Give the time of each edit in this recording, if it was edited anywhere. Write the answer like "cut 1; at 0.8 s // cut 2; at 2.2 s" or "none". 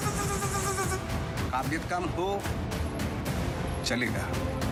none